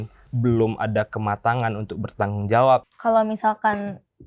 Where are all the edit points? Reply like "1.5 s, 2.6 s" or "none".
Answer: 2.9 s